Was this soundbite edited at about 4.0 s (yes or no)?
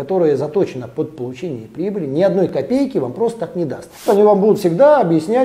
yes